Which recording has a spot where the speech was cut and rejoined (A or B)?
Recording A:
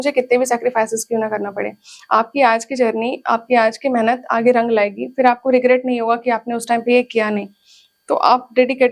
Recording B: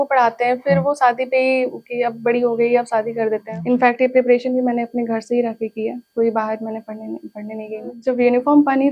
B